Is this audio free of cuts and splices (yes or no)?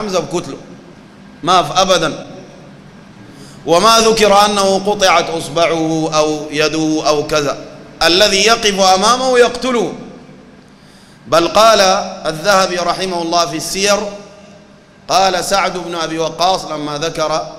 yes